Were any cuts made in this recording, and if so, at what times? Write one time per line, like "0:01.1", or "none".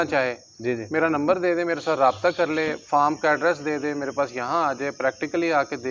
none